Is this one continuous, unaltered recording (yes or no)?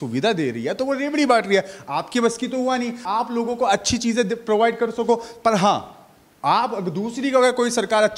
yes